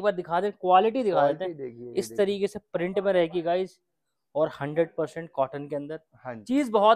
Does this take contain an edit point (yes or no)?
no